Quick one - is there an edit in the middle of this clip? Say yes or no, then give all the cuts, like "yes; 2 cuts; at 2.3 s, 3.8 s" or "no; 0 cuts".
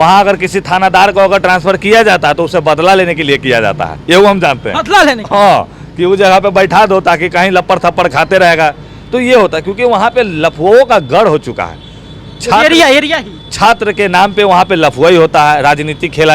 no; 0 cuts